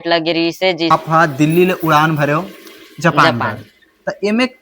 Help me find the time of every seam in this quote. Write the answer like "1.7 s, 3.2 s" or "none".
0.9 s